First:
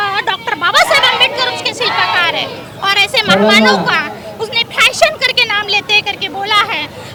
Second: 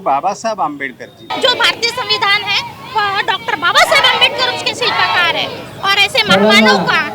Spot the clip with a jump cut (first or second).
second